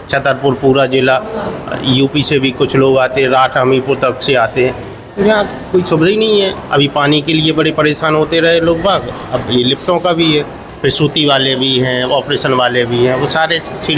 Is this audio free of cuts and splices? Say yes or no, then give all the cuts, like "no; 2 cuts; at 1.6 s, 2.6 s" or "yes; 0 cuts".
no; 1 cut; at 10.6 s